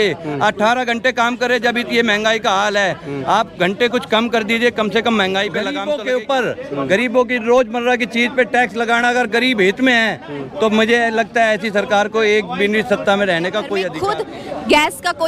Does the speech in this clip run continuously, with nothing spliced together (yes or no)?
no